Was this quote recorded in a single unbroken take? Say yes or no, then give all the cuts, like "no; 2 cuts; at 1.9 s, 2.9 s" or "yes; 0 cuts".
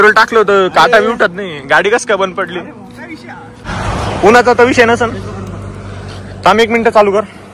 no; 1 cut; at 3.7 s